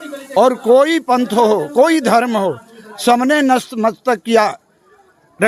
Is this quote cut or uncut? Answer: uncut